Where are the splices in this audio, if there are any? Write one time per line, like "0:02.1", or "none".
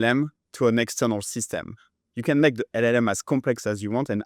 none